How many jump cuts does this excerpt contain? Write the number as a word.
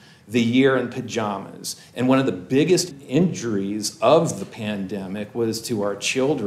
one